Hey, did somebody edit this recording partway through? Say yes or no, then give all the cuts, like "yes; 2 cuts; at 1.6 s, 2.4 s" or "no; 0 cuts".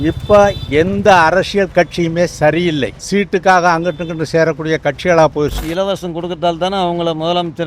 yes; 2 cuts; at 3.0 s, 5.5 s